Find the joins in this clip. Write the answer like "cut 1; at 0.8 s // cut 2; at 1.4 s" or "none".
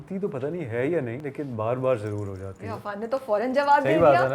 cut 1; at 1.2 s